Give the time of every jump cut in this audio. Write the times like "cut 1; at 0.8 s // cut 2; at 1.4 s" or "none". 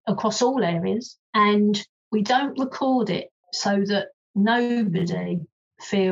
cut 1; at 1.2 s // cut 2; at 1.9 s // cut 3; at 3.9 s